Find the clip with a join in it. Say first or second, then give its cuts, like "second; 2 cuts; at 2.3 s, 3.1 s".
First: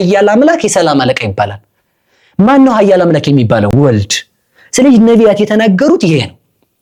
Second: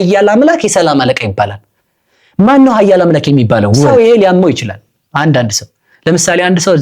second; 1 cut; at 3.9 s